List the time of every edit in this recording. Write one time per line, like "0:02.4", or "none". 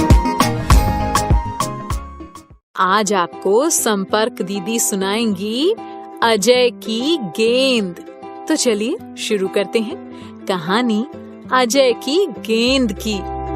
0:02.6